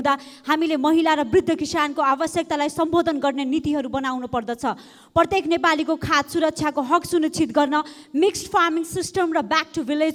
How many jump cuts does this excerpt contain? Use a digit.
0